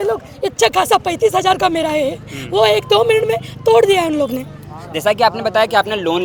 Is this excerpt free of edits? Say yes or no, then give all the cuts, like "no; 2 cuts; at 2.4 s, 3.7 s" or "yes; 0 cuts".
yes; 0 cuts